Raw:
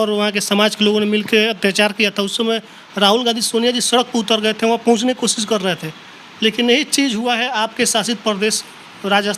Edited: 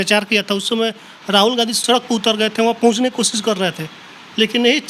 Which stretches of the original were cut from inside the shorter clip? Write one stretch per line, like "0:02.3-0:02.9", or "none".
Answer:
0:03.5-0:03.8